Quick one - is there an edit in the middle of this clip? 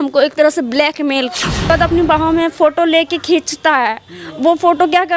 yes; 1 cut; at 1.7 s

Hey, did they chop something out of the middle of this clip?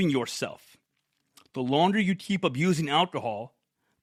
no; 0 cuts

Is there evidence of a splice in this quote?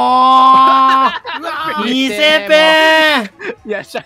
no; 0 cuts

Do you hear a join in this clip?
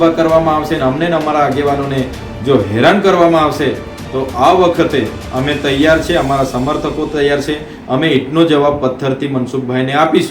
no; 0 cuts

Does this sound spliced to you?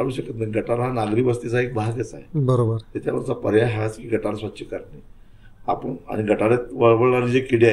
no; 0 cuts

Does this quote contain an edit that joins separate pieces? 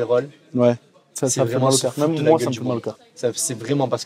no; 0 cuts

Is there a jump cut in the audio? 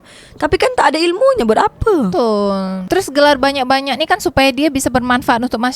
no; 0 cuts

